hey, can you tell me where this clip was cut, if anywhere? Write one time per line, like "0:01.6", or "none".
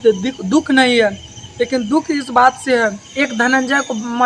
0:03.0